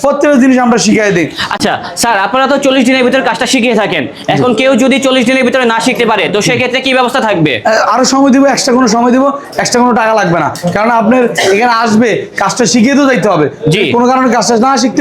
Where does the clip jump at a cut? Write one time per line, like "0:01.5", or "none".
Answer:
0:01.6